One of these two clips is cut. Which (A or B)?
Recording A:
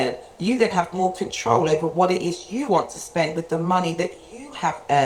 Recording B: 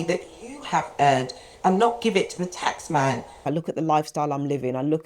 B